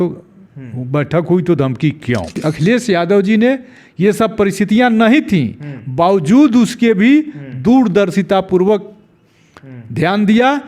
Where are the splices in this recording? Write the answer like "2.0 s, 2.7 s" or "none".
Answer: 2.4 s